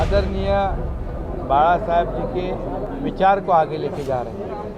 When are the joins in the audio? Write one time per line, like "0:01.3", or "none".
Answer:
0:02.9